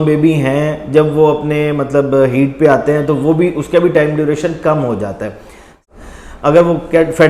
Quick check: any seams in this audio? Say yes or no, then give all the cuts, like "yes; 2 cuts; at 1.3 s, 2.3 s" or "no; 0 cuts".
yes; 1 cut; at 5.8 s